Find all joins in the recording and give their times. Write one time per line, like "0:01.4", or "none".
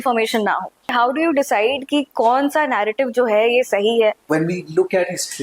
0:00.9
0:04.3

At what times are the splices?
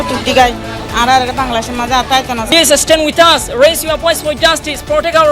0:02.5

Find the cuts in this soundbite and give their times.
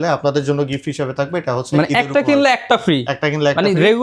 none

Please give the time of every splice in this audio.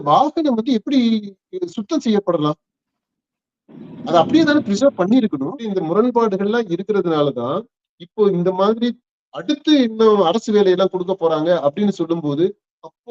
0:05.5

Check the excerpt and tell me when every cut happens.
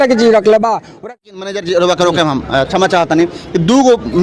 0:00.9

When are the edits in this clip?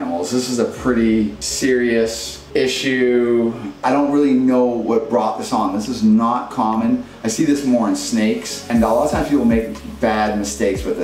0:01.4
0:02.3
0:03.8
0:08.7

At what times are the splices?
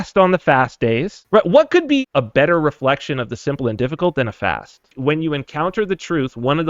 0:01.1
0:02.1
0:04.9

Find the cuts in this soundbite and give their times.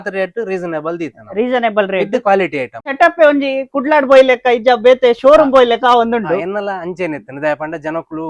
0:02.9

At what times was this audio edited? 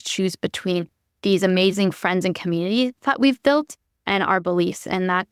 none

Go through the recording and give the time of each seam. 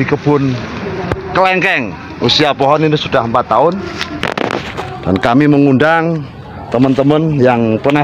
0:04.2

